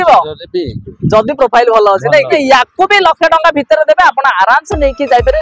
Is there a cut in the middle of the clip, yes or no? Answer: yes